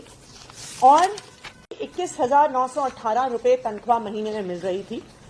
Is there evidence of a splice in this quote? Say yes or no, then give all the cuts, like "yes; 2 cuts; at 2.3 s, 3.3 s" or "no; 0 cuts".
yes; 1 cut; at 1.7 s